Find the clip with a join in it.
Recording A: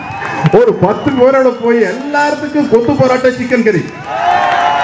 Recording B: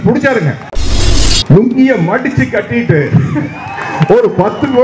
B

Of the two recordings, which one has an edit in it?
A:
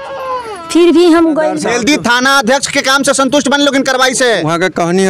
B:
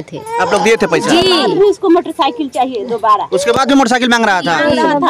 A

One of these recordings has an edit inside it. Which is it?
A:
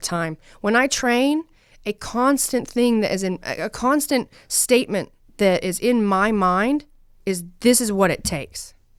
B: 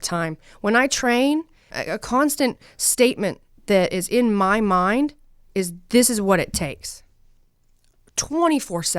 B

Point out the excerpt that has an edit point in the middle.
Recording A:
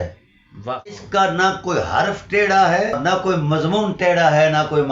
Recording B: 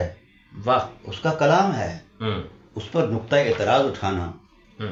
A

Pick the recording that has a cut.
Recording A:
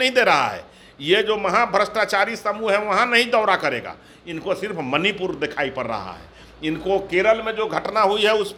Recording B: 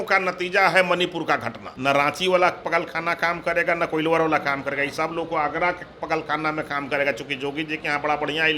B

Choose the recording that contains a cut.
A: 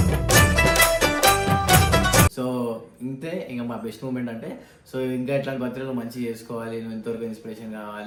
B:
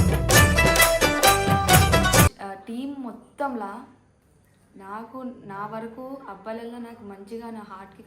B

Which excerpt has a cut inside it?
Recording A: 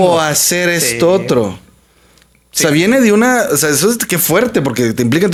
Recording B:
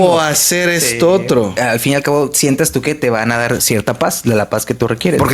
B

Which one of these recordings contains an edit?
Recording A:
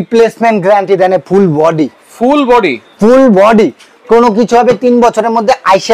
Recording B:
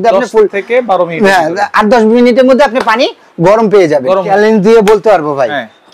B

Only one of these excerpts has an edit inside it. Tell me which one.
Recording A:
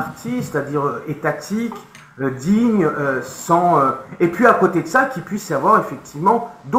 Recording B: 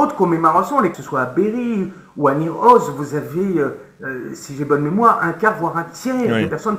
B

